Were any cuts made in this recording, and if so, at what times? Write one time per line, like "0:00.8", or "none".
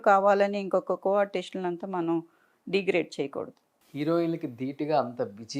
0:03.7